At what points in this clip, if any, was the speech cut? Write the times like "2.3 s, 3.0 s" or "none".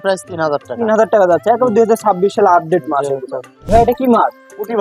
3.6 s